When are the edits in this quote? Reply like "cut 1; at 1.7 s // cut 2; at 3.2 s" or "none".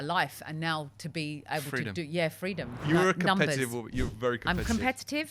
cut 1; at 2.7 s